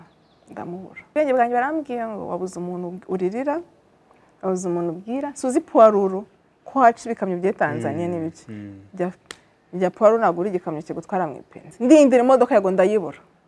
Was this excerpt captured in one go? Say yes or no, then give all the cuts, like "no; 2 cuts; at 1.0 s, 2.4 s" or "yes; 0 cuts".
no; 2 cuts; at 1.1 s, 11.7 s